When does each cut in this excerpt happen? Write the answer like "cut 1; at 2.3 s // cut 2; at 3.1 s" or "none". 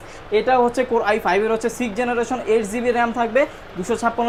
none